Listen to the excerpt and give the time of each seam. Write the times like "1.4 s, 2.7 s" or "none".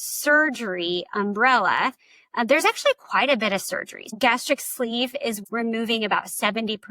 4.1 s, 5.4 s